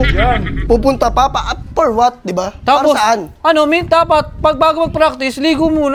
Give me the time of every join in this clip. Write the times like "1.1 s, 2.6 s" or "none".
none